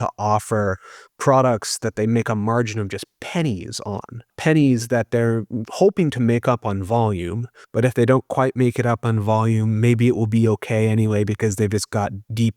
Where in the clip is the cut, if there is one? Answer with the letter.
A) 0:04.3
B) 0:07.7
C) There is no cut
A